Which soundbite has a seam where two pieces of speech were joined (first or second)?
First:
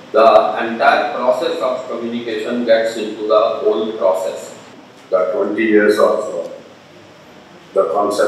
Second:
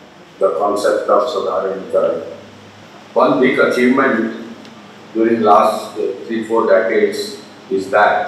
first